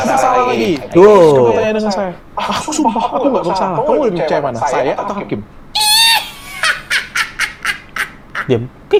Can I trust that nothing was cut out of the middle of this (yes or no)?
yes